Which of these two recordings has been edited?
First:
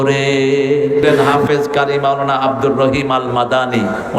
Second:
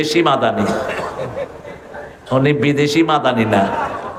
first; 1 cut; at 1.4 s

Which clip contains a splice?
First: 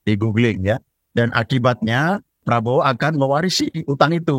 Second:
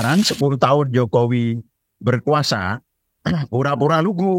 first; 2 cuts; at 0.9 s, 2.4 s

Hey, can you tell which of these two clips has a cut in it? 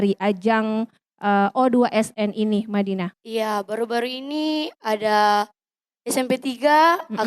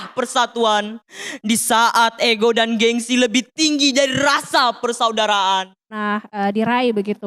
second; 1 cut; at 6.0 s

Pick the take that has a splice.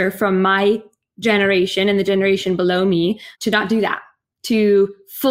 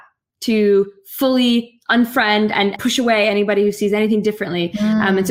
second; 1 cut; at 2.8 s

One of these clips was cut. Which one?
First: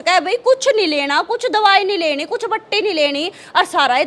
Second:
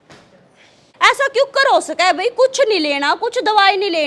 second; 1 cut; at 1.0 s

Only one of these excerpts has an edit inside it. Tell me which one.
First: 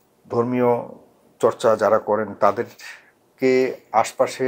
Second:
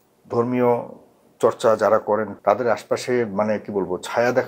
second; 1 cut; at 2.3 s

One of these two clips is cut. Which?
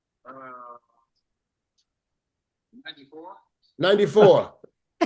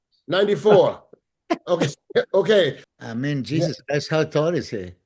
second; 1 cut; at 2.9 s

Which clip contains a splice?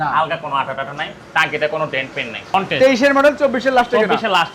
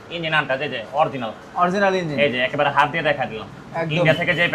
first; 1 cut; at 2.5 s

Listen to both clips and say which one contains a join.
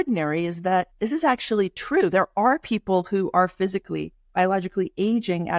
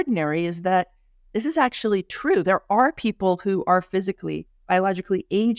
first; 1 cut; at 0.9 s

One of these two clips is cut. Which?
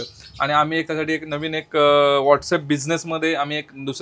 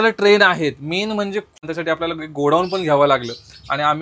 second; 1 cut; at 1.6 s

